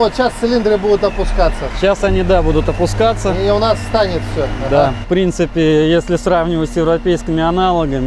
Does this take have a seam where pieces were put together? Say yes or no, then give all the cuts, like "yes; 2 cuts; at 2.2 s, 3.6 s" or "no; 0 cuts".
yes; 1 cut; at 5.0 s